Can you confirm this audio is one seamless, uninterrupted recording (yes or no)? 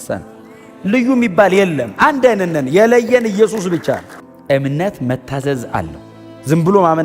no